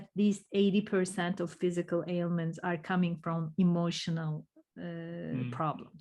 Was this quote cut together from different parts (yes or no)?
no